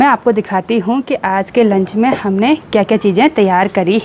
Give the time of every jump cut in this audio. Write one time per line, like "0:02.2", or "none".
none